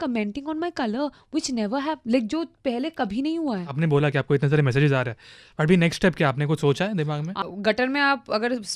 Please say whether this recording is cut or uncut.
cut